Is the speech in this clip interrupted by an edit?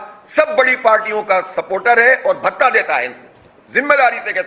no; 0 cuts

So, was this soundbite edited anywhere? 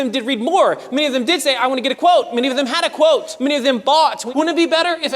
yes; 2 cuts; at 3.3 s, 4.2 s

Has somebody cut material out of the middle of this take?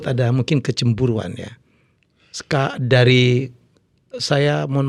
no; 0 cuts

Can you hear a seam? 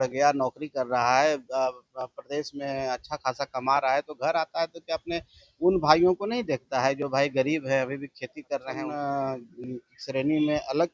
yes; 1 cut; at 8.8 s

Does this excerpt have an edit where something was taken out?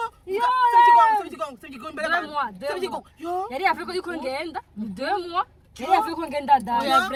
no; 0 cuts

